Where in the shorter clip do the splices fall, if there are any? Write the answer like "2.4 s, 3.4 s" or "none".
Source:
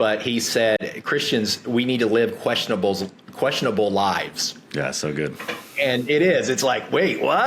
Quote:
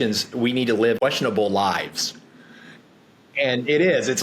1.0 s